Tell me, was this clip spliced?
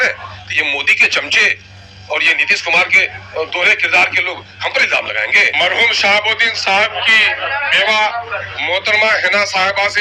yes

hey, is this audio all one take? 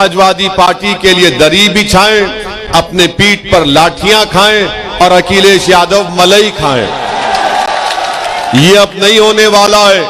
yes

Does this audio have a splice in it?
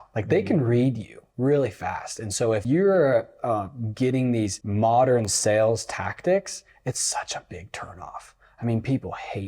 yes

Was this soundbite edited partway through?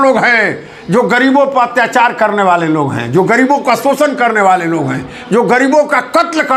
no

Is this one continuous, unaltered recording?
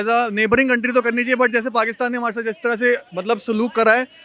yes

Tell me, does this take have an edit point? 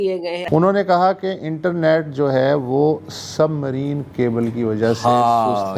no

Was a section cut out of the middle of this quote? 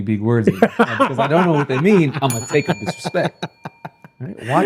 no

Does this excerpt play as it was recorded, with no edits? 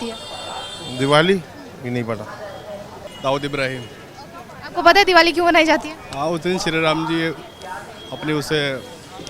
no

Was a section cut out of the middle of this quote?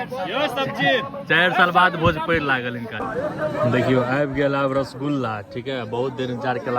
yes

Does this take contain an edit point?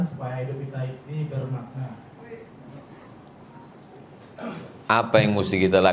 no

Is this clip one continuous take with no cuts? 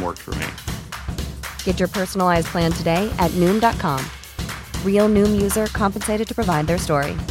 yes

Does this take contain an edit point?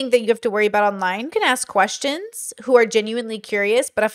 yes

